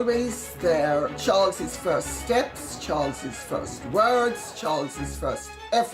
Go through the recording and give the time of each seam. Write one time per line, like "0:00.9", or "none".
0:01.2

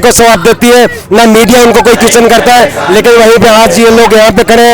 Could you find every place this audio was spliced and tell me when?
none

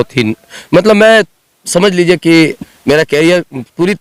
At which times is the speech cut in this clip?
none

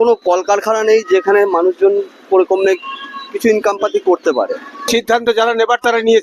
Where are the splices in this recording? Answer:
0:04.9

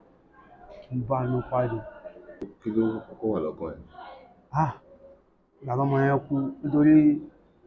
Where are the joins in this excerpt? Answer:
0:02.5

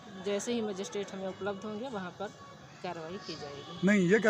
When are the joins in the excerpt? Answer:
none

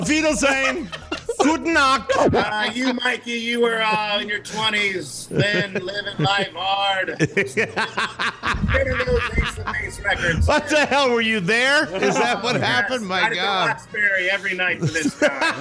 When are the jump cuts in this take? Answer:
0:02.4

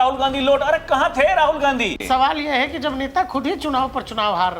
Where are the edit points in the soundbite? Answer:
0:02.0

